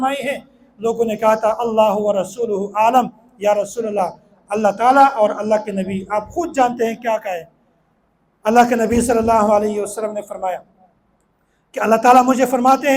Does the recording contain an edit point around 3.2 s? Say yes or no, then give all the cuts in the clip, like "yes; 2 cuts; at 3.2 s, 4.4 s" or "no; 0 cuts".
no; 0 cuts